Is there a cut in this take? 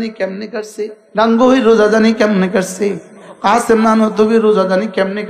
yes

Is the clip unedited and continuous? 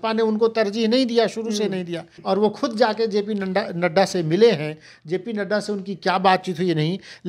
no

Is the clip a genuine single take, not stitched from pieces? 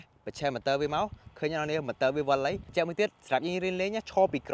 no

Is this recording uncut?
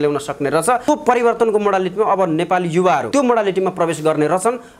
no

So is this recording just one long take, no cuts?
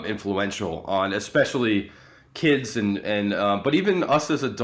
yes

